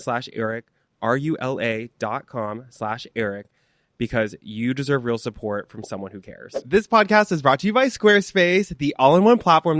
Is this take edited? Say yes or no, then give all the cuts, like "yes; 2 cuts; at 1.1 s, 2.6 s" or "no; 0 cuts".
no; 0 cuts